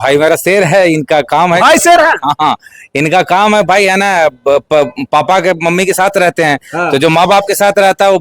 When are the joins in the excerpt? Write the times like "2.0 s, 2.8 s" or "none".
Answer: none